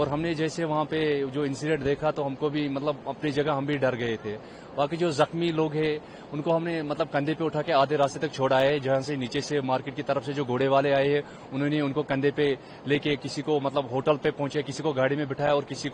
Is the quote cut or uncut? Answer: uncut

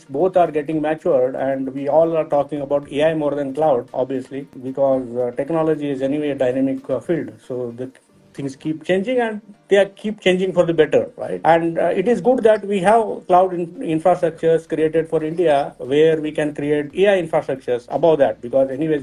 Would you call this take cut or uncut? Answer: uncut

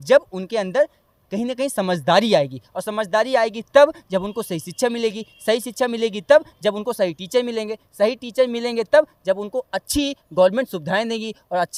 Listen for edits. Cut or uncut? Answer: uncut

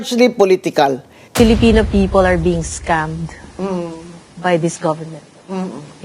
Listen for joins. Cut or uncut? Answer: cut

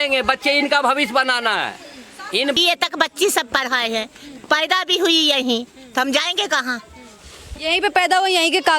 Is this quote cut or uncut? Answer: cut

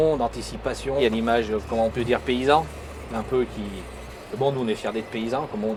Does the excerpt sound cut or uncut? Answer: uncut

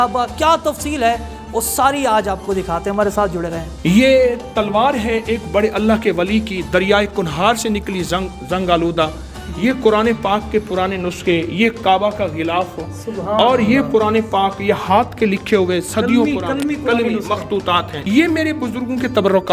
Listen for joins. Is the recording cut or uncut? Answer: cut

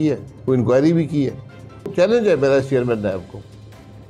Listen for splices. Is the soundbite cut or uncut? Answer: cut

